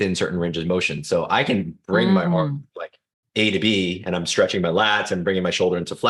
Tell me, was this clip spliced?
no; 0 cuts

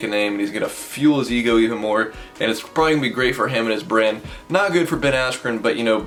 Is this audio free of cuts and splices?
yes; 0 cuts

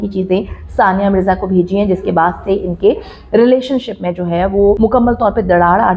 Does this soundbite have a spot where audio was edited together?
yes; 1 cut; at 4.8 s

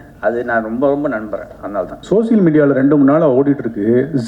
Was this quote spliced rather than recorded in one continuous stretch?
yes; 1 cut; at 2.0 s

